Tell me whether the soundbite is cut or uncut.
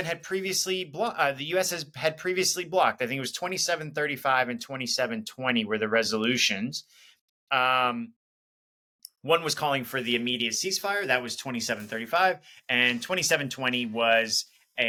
uncut